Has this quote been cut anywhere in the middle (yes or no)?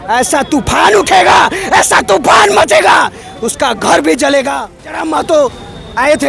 yes